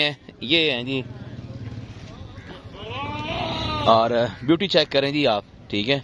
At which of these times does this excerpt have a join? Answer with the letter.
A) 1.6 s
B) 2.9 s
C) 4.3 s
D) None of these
D